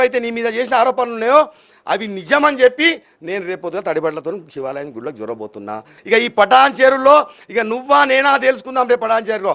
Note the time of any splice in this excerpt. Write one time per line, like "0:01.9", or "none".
0:05.9

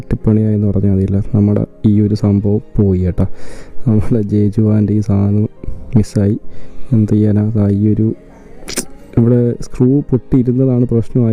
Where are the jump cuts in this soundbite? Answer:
none

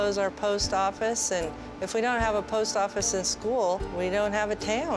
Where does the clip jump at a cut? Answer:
0:03.9

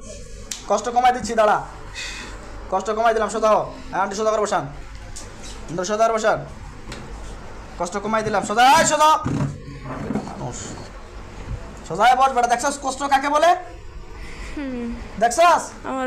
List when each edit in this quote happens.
none

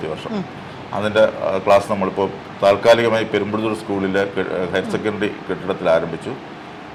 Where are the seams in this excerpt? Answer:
none

